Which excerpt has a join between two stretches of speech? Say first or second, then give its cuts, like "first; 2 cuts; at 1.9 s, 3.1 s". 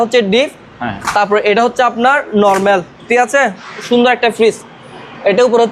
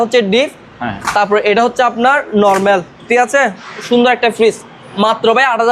second; 1 cut; at 4.8 s